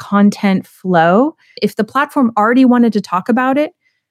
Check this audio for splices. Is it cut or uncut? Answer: cut